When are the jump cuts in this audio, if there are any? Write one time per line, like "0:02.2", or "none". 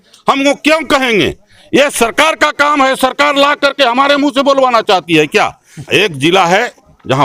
0:05.8